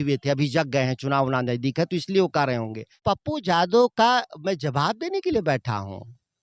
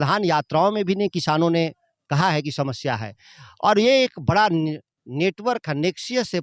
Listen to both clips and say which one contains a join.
first; 1 cut; at 3.0 s

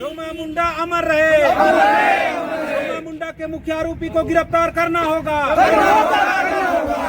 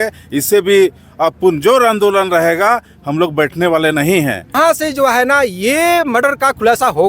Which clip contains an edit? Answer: second; 1 cut; at 4.6 s

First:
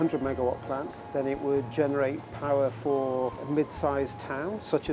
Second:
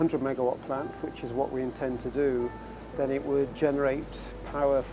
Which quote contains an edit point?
first; 3 cuts; at 0.9 s, 2.3 s, 3.4 s

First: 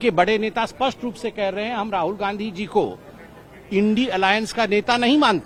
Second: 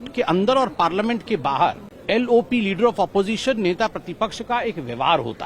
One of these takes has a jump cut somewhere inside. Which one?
second; 1 cut; at 1.9 s

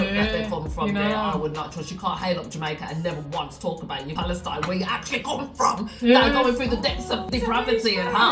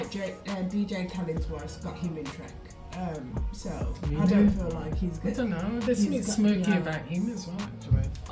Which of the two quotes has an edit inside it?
first; 2 cuts; at 4.1 s, 7.3 s

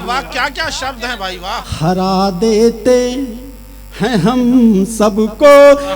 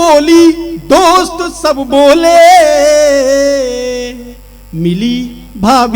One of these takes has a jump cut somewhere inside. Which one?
first; 1 cut; at 1.7 s

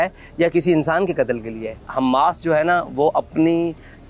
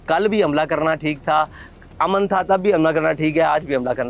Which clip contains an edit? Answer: first; 1 cut; at 1.8 s

